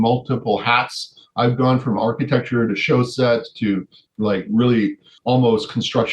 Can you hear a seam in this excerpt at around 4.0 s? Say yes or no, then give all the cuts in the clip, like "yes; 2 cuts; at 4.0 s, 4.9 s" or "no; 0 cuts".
yes; 2 cuts; at 4.0 s, 5.1 s